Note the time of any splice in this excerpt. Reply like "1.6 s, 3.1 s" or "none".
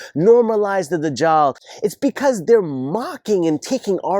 1.6 s